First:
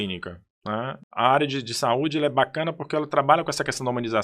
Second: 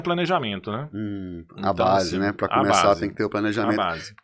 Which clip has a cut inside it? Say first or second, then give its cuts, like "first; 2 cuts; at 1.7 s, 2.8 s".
first; 1 cut; at 1.0 s